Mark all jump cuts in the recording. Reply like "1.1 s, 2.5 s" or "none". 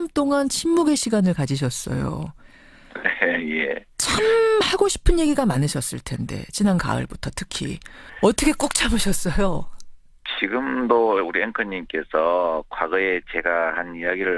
none